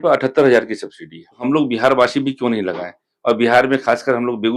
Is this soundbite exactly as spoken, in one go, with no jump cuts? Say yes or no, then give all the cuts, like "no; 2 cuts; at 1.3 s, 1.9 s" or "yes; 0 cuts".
no; 1 cut; at 1.4 s